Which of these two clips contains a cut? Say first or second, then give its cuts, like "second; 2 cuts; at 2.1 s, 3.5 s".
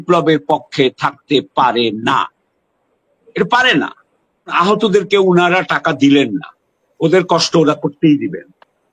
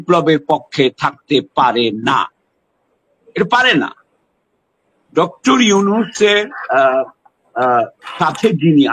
first; 1 cut; at 4.5 s